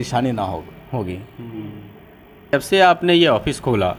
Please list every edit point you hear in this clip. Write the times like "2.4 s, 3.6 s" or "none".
2.5 s

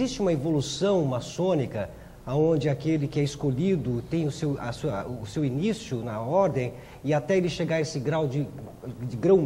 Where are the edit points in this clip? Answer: none

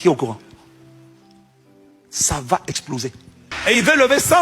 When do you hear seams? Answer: 3.5 s

